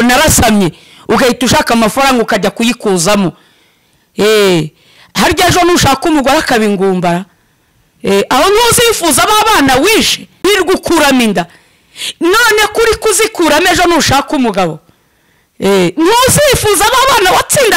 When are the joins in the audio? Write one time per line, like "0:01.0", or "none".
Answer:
none